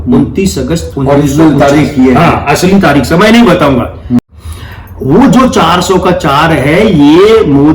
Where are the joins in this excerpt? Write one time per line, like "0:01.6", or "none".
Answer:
0:04.3